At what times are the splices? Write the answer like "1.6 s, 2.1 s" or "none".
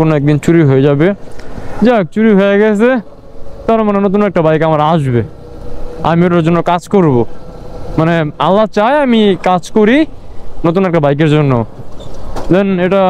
none